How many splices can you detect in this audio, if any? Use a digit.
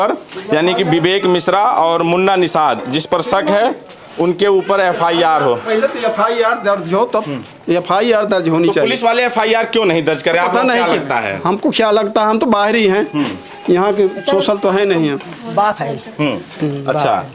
0